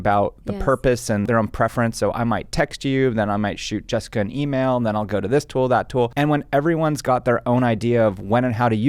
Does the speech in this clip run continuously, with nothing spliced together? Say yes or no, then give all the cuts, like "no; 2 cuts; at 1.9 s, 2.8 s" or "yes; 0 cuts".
no; 1 cut; at 1.3 s